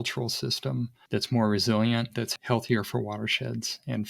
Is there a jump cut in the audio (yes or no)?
yes